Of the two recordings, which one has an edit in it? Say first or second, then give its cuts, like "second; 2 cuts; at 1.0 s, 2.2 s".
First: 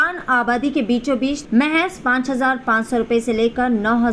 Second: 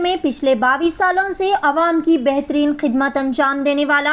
first; 1 cut; at 1.4 s